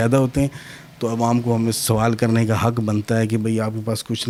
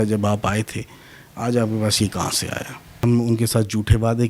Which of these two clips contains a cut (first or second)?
second